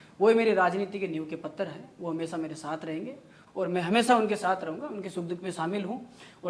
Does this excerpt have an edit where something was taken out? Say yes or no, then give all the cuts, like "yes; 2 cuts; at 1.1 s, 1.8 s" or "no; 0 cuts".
no; 0 cuts